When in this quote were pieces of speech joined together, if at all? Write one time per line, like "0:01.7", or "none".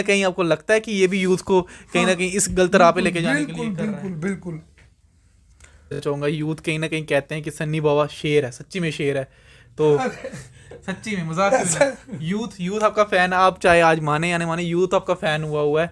0:06.0